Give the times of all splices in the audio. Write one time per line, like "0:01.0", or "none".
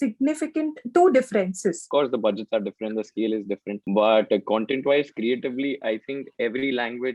0:01.8
0:03.7